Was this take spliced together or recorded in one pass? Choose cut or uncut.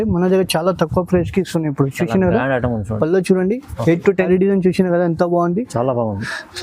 cut